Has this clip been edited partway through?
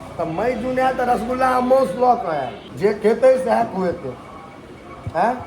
yes; 1 cut; at 2.6 s

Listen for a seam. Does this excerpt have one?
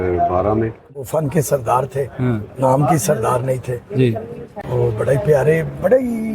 yes; 1 cut; at 1.0 s

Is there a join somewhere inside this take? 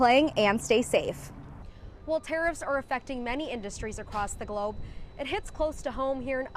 yes; 1 cut; at 1.6 s

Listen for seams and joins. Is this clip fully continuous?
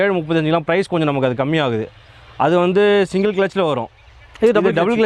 yes; 0 cuts

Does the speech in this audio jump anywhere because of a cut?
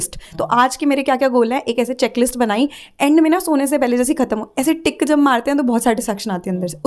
no; 0 cuts

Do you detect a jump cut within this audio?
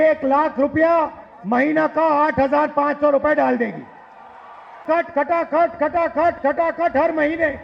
yes; 1 cut; at 4.8 s

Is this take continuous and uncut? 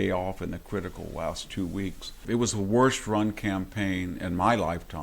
no; 1 cut; at 2.2 s

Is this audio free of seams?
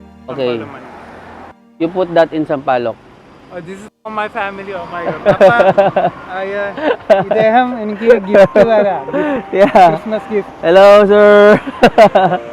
yes; 0 cuts

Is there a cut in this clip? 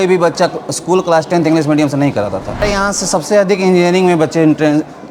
yes; 1 cut; at 2.6 s

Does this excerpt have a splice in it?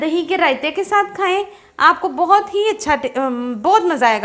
no; 0 cuts

